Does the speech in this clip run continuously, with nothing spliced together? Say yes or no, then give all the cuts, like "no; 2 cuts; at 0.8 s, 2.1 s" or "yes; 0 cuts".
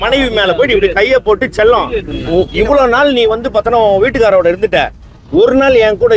yes; 0 cuts